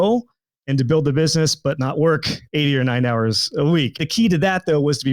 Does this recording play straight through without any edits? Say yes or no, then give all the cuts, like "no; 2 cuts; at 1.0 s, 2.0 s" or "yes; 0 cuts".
no; 1 cut; at 4.0 s